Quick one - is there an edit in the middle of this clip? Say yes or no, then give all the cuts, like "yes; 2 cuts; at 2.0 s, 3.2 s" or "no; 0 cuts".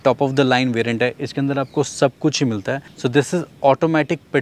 no; 0 cuts